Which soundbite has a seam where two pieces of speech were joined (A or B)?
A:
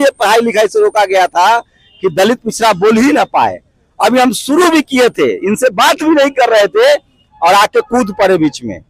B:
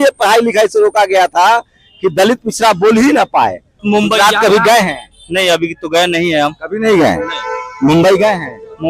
B